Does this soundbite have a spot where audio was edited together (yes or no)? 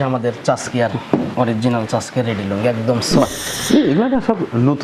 yes